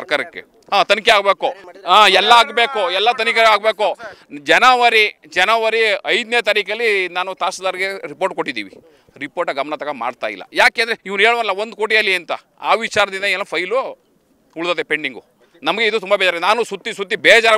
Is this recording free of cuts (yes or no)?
yes